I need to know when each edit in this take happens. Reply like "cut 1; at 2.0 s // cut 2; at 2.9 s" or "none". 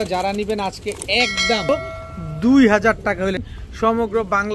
cut 1; at 1.7 s // cut 2; at 3.5 s